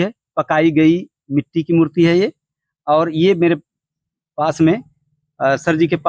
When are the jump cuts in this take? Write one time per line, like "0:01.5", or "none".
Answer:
none

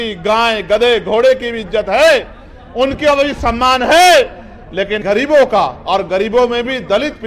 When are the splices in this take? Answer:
0:05.0

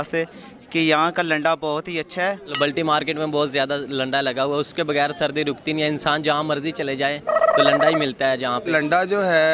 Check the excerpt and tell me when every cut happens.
0:02.5
0:08.6

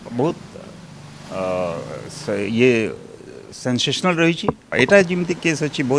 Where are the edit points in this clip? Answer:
0:04.6

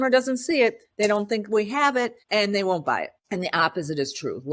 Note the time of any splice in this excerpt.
0:02.2
0:03.2

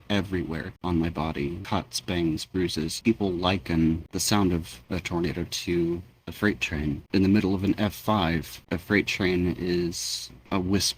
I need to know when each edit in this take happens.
0:01.6
0:03.0
0:07.0

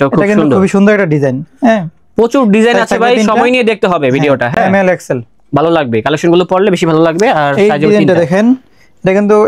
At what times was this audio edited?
none

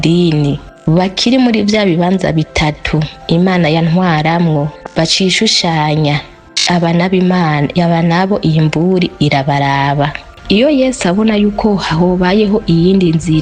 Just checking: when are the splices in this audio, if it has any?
0:10.3

